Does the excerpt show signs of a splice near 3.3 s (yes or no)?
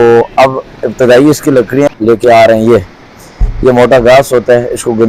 no